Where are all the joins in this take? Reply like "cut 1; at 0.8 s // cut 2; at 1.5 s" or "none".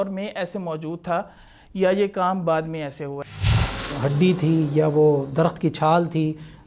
cut 1; at 3.6 s